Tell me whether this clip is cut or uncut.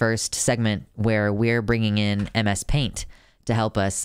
uncut